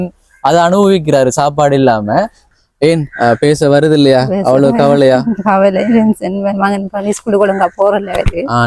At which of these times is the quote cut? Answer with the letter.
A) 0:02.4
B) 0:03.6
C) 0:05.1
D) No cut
A